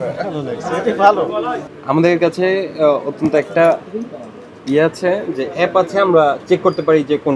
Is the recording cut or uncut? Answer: cut